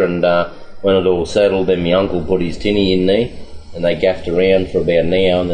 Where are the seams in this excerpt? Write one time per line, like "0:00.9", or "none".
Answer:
none